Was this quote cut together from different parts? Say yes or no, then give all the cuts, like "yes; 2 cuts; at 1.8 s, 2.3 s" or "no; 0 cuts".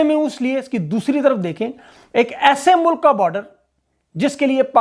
no; 0 cuts